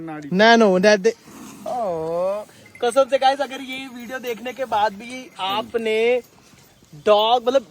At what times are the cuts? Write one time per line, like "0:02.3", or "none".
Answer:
0:01.3